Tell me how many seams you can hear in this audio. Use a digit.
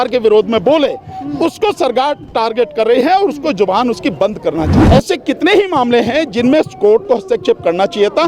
1